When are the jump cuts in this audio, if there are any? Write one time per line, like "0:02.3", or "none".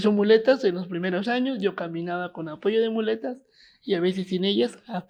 none